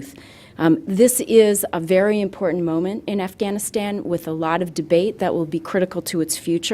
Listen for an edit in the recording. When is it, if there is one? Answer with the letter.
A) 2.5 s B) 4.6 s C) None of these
A